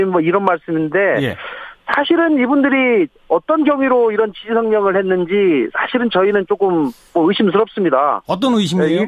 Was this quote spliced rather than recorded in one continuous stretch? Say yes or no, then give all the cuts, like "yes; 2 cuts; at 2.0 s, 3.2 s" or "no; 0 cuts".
yes; 1 cut; at 3.2 s